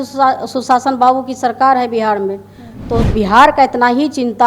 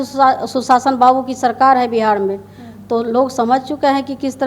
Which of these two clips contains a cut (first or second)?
first